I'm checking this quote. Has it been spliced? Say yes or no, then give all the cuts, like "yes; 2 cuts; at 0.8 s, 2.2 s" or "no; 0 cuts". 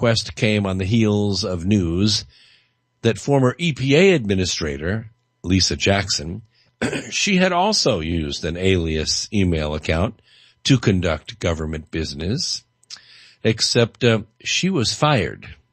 yes; 1 cut; at 6.7 s